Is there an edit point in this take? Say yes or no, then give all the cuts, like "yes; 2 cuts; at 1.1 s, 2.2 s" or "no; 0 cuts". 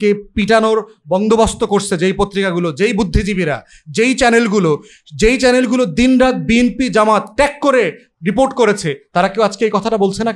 no; 0 cuts